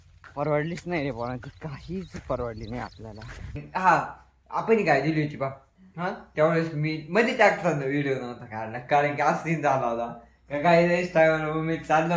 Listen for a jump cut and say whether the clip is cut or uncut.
cut